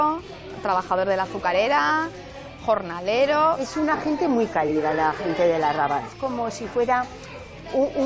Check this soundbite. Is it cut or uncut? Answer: cut